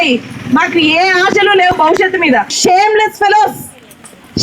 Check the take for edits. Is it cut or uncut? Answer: cut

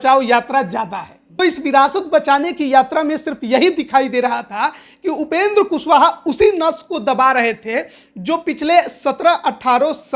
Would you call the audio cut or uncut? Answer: cut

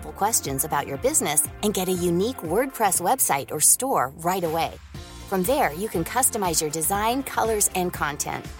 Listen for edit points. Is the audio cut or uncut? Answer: uncut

